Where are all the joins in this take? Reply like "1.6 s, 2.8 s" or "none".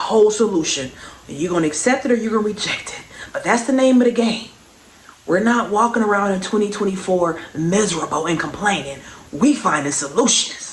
none